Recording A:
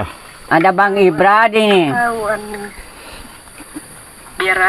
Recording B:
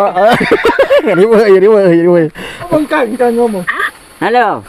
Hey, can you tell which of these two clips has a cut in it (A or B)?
B